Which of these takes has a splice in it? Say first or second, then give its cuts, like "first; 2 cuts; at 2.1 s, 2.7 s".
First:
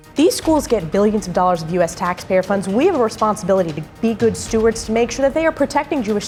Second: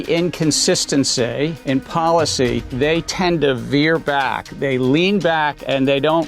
second; 3 cuts; at 1.6 s, 2.7 s, 4.5 s